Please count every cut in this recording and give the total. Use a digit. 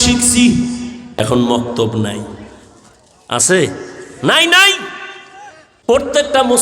2